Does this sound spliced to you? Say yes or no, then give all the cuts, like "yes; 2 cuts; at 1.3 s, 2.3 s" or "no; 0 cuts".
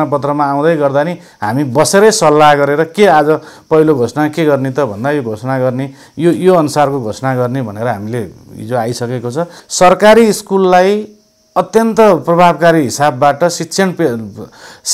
yes; 1 cut; at 9.6 s